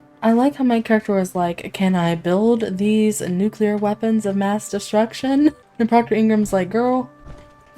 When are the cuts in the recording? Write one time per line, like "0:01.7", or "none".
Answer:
0:05.7

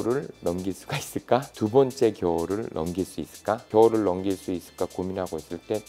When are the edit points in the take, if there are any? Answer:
none

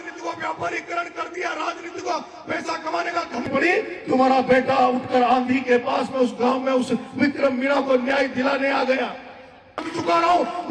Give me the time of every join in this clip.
0:03.5
0:09.9

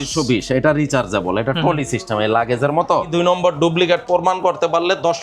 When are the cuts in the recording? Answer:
0:03.1

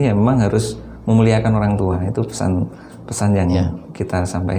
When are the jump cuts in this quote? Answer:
none

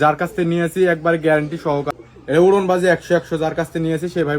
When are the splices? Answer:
0:01.9

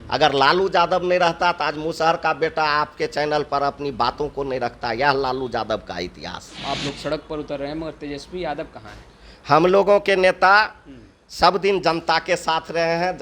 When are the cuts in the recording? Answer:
0:06.5

